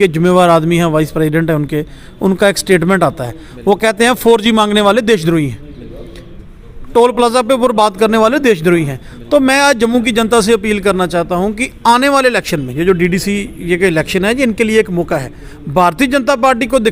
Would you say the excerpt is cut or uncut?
uncut